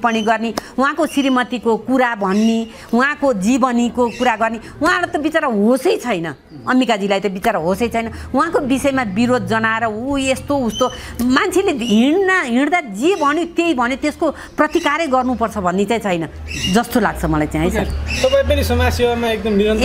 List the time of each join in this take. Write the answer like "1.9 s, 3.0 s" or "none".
none